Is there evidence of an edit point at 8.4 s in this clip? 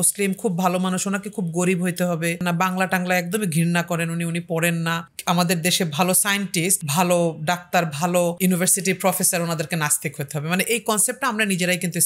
yes; 4 cuts; at 2.4 s, 5.1 s, 6.8 s, 8.4 s

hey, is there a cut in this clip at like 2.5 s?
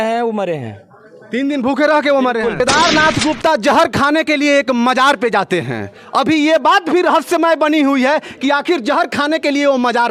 yes; 1 cut; at 2.5 s

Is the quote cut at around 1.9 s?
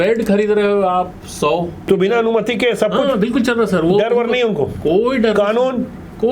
yes; 1 cut; at 1.9 s

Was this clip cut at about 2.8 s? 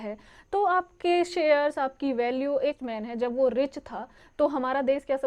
yes; 1 cut; at 2.8 s

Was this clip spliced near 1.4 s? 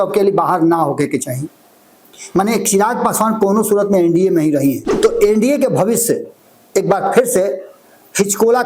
no; 1 cut; at 4.9 s

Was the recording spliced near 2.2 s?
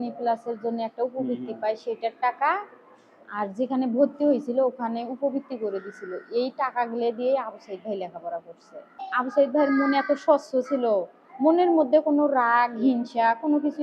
no; 1 cut; at 9.0 s

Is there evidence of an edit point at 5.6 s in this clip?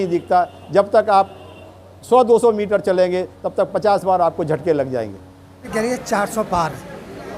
yes; 1 cut; at 5.6 s

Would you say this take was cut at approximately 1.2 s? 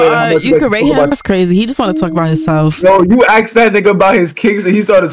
no; 0 cuts

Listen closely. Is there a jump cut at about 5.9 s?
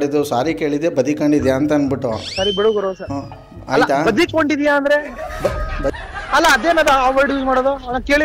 yes; 1 cut; at 5.9 s

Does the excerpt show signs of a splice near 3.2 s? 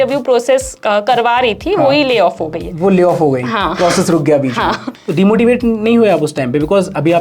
no; 1 cut; at 4.9 s

